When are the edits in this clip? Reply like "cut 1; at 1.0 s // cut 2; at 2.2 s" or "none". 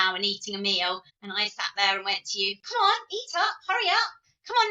cut 1; at 1.2 s